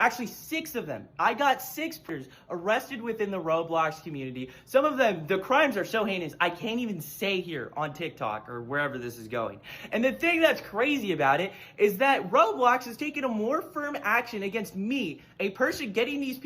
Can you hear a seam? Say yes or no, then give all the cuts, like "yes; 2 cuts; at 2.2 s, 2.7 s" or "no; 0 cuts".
yes; 1 cut; at 2.1 s